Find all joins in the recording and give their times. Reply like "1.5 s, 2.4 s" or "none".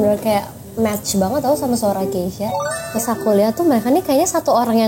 2.8 s